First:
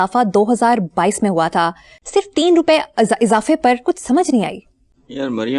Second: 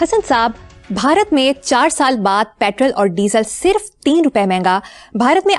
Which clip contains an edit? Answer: first; 1 cut; at 1.9 s

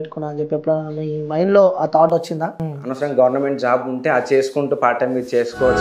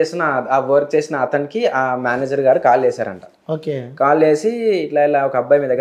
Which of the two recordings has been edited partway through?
first; 1 cut; at 2.7 s

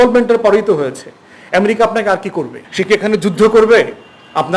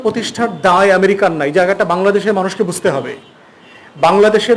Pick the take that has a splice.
first; 1 cut; at 2.6 s

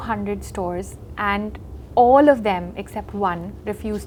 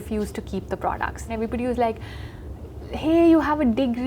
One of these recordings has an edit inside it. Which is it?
second; 1 cut; at 1.3 s

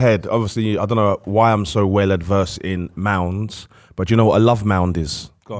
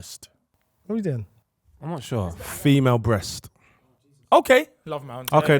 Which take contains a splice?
second; 1 cut; at 1.3 s

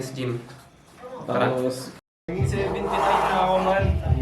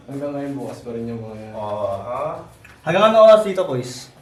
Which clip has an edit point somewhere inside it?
first; 1 cut; at 2.0 s

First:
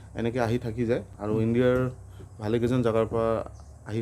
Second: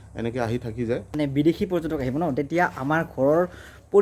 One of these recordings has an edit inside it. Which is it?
second; 1 cut; at 1.1 s

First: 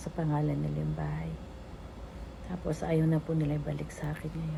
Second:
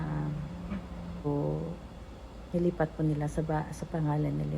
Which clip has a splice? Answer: second; 1 cut; at 1.2 s

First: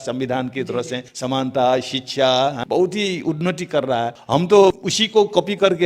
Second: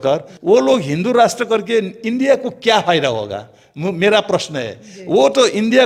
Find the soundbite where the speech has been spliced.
first; 4 cuts; at 1.1 s, 2.6 s, 4.2 s, 4.9 s

